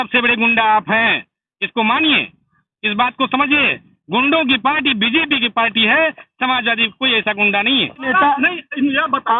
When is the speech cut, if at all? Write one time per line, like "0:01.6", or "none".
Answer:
0:08.1